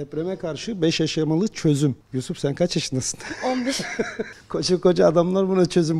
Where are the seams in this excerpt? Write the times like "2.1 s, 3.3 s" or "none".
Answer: 2.0 s, 4.4 s